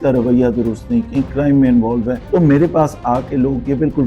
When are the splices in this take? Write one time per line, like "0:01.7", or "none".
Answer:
0:02.2